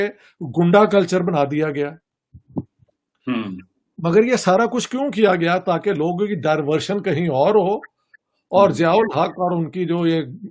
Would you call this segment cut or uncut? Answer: uncut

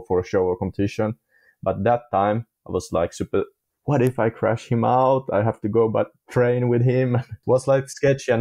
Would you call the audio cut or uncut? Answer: cut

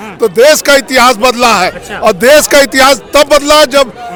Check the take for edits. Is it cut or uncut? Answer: uncut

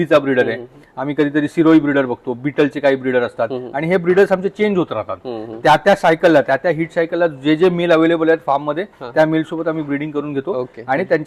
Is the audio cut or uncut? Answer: uncut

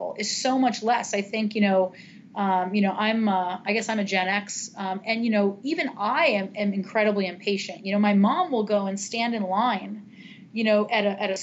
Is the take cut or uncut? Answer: uncut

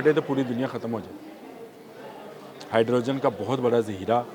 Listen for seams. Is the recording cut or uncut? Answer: uncut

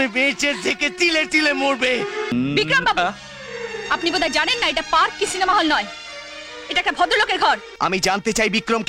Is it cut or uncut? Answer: cut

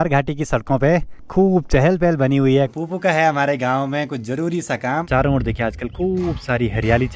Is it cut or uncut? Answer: cut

